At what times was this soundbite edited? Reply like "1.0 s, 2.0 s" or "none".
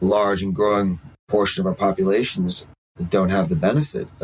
1.1 s